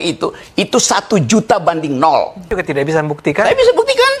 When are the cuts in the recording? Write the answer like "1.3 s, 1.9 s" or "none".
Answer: 2.6 s